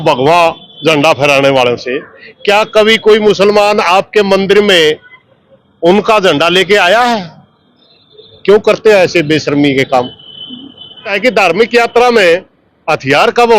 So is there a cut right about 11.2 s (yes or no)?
yes